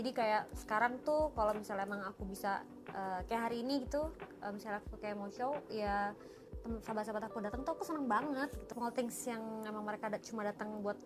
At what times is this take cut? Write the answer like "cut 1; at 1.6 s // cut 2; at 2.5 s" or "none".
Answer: cut 1; at 8.6 s